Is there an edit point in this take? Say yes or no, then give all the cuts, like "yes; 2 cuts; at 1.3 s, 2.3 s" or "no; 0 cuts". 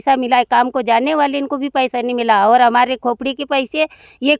no; 0 cuts